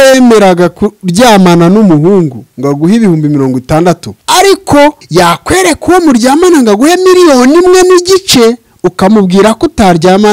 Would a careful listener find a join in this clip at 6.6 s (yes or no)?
no